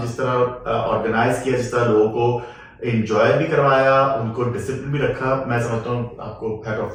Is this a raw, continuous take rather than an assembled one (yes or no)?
yes